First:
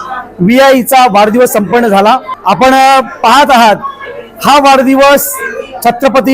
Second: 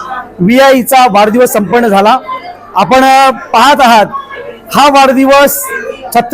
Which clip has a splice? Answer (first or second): first